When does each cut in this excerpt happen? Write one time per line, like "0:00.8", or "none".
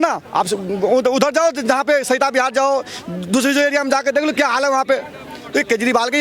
none